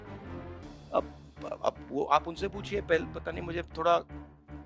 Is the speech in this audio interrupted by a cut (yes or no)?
yes